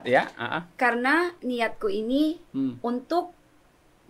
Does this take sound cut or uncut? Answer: uncut